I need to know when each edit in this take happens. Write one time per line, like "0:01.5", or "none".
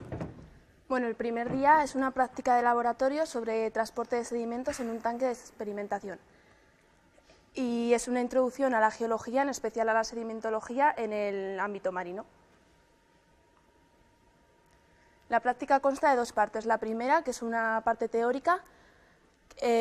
0:13.1